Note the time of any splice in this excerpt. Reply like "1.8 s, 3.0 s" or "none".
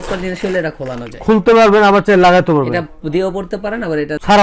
none